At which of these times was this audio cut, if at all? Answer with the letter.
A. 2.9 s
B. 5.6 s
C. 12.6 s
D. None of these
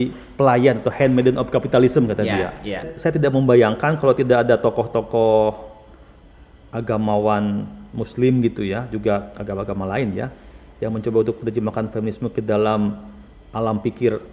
A